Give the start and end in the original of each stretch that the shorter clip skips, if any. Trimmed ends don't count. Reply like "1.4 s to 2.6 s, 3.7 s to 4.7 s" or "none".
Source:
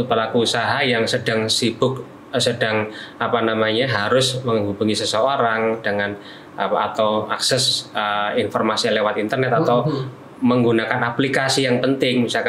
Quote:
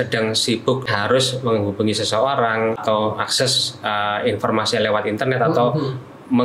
2.1 s to 3.9 s, 5.8 s to 6.9 s